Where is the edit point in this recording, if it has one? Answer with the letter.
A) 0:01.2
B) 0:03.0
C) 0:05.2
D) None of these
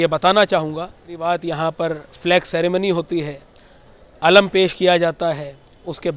A